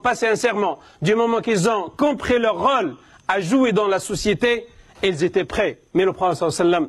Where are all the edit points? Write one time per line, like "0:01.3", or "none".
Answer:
0:05.8